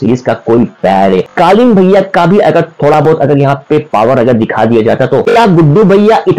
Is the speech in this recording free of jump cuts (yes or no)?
no